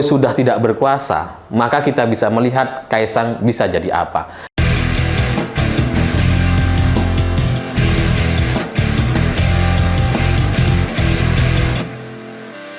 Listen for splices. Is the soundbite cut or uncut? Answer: cut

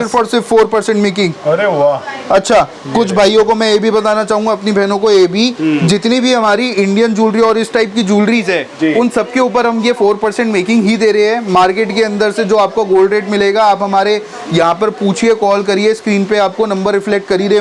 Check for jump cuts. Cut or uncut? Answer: uncut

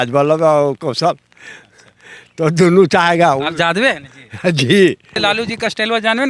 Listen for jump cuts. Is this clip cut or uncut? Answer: cut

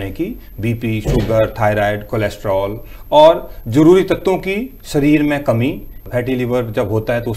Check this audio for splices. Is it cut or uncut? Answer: cut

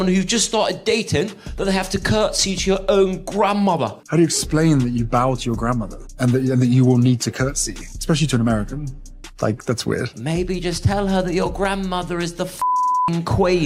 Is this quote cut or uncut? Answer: uncut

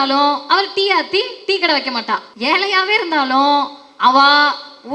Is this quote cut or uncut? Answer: cut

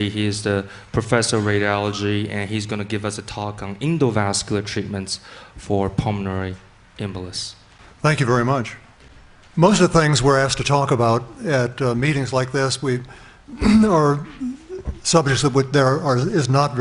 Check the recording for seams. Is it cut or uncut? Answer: uncut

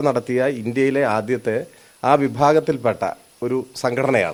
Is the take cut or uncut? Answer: uncut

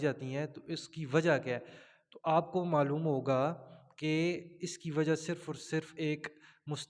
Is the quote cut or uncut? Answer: uncut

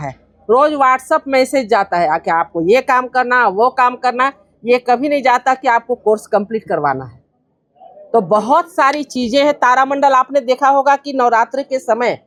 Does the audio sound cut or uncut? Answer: uncut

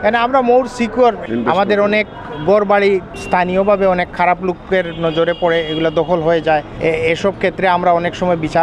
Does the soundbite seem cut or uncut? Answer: cut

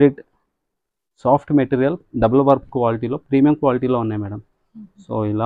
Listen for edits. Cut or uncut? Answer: uncut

